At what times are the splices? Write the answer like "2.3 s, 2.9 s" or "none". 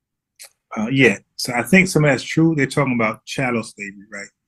none